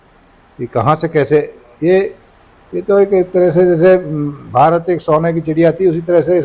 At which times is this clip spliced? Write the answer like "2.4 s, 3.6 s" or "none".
none